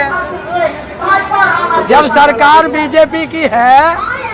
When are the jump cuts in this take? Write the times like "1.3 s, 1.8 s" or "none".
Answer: none